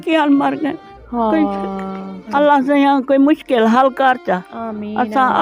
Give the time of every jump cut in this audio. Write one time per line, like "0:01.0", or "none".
0:02.2